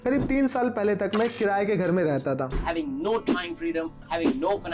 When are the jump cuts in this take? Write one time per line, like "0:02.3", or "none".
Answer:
0:02.5